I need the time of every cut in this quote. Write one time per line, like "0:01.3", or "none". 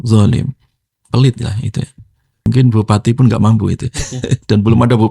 0:02.4